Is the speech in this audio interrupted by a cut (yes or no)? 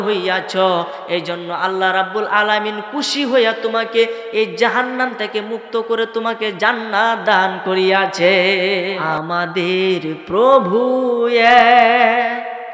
yes